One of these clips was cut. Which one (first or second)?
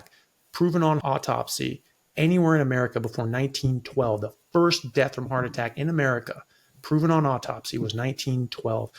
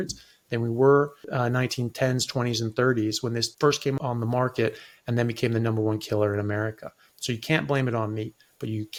first